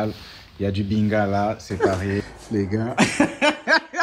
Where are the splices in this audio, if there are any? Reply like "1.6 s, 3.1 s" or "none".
1.8 s